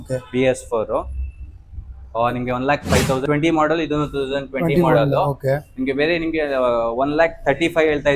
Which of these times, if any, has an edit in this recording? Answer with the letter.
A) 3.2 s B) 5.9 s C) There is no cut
A